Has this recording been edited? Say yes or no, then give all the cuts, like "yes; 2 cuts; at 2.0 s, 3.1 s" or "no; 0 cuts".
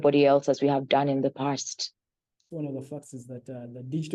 yes; 1 cut; at 2.4 s